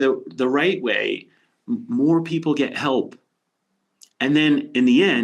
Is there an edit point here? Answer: no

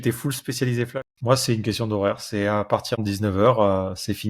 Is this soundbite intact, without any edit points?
no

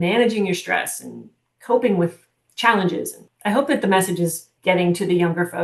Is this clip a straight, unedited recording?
no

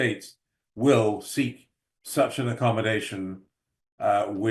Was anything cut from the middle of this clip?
no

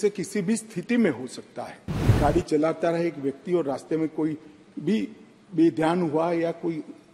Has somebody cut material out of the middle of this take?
yes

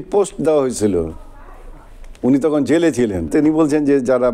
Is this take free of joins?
no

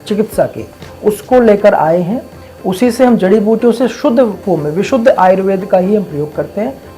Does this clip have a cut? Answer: yes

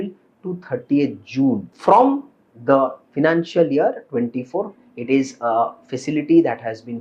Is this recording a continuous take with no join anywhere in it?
no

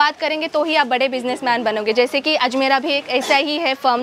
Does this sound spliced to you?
no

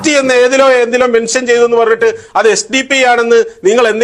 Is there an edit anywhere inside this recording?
no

